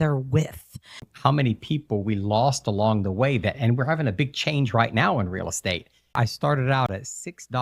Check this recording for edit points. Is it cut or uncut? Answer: cut